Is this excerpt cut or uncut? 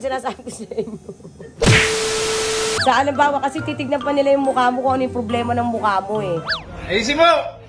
cut